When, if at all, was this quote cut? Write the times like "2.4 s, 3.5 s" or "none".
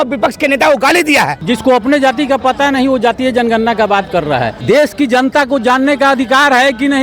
1.4 s, 4.6 s